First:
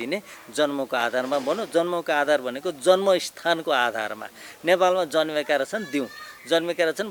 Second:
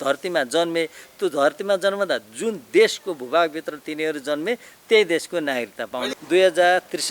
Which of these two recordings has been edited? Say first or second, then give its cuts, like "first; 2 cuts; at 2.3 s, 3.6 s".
second; 1 cut; at 6.1 s